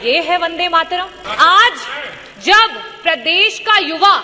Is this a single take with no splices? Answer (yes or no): no